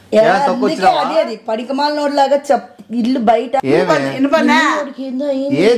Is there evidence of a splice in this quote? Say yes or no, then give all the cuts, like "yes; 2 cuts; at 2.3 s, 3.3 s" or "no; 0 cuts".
yes; 1 cut; at 3.6 s